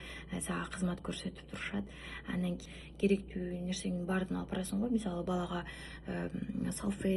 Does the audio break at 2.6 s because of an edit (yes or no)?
yes